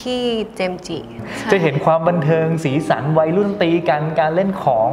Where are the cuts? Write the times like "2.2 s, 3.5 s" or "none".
1.1 s